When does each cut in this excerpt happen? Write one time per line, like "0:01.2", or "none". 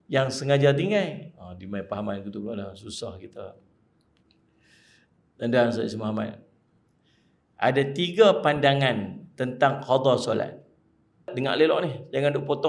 0:11.3